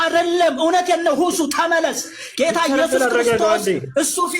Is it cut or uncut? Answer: uncut